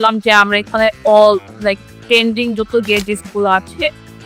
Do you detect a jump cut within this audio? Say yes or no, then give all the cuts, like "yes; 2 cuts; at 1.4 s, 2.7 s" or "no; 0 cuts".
no; 0 cuts